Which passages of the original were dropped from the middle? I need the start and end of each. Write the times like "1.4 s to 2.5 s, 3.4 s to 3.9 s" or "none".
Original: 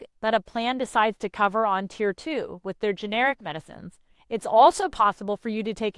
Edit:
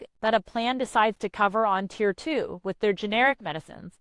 none